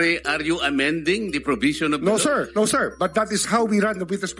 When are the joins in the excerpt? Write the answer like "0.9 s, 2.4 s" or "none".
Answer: 2.5 s